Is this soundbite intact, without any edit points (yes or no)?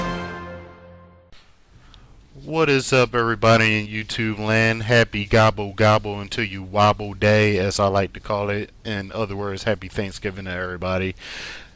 yes